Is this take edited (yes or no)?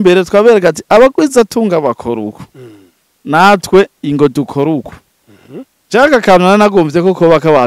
no